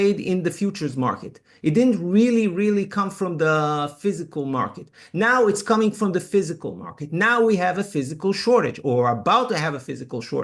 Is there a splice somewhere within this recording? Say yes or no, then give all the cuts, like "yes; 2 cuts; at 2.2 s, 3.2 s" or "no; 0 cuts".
no; 0 cuts